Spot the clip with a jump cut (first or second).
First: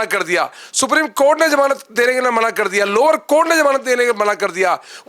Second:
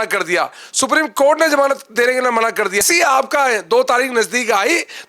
second